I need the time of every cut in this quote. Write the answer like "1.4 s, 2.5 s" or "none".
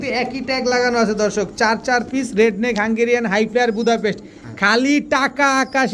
none

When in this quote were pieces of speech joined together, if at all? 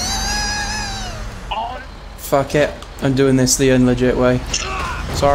1.8 s

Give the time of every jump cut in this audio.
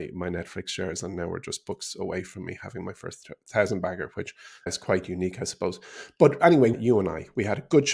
4.7 s, 6.7 s

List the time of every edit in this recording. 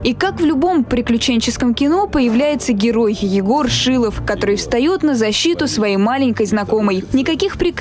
5.0 s

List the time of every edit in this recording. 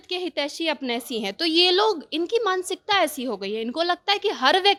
none

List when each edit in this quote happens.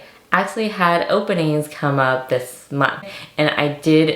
3.1 s

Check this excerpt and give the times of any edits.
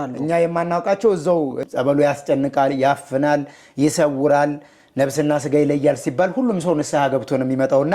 1.6 s

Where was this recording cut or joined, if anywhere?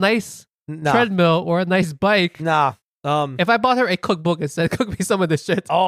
2.8 s

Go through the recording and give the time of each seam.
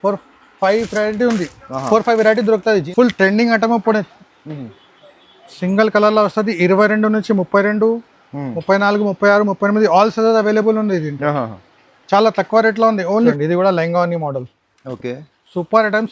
2.9 s, 13.3 s

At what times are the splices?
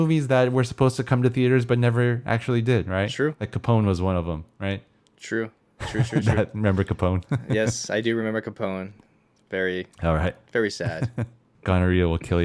11.4 s

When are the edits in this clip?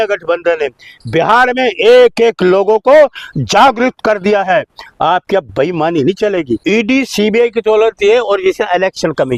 6.6 s

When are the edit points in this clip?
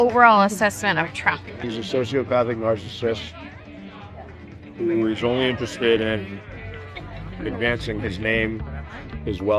1.5 s

